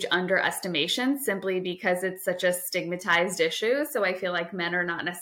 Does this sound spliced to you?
no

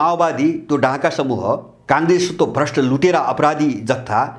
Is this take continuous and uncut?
no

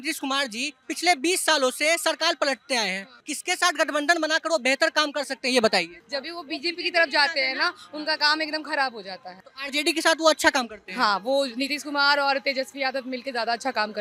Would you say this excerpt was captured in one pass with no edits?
yes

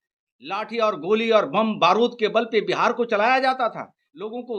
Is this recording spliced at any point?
no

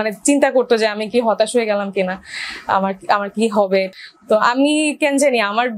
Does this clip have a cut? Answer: yes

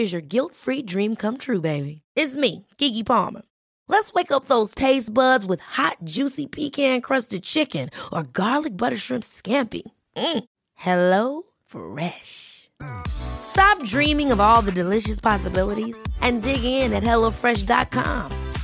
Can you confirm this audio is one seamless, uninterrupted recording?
yes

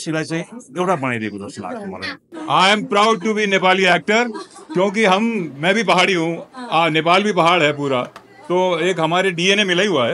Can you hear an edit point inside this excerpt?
yes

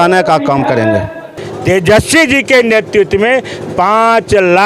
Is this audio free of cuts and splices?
no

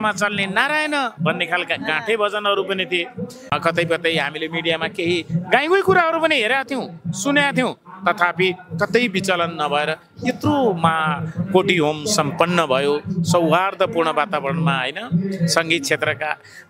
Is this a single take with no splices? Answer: no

